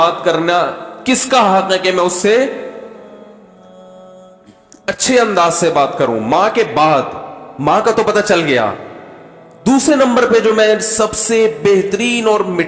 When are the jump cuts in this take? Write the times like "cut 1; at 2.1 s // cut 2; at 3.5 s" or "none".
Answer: none